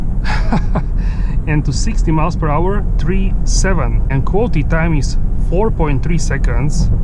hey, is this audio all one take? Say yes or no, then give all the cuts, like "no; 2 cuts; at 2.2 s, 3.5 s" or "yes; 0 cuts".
yes; 0 cuts